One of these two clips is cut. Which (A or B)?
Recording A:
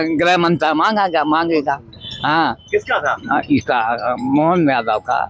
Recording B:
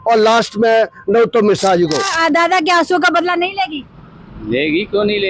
B